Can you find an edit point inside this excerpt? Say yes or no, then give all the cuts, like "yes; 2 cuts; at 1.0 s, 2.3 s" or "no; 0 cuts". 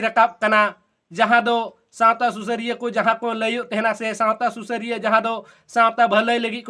no; 0 cuts